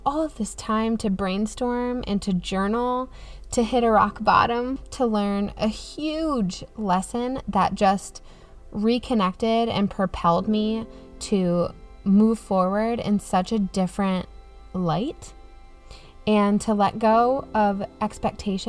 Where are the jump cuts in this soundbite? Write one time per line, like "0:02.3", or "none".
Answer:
0:04.8